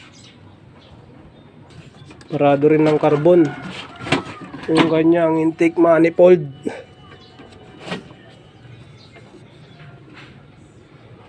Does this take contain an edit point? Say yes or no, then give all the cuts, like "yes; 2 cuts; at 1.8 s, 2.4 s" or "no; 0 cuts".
yes; 1 cut; at 1.7 s